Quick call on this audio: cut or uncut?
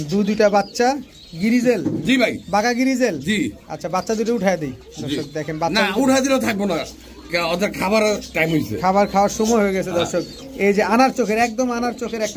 uncut